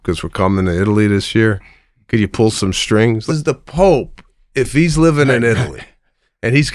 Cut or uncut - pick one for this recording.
cut